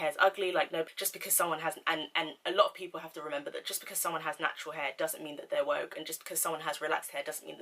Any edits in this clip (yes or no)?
yes